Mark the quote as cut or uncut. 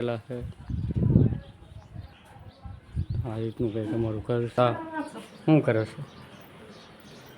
cut